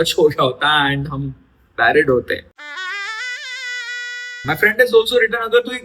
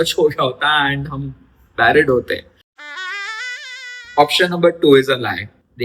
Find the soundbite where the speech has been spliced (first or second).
first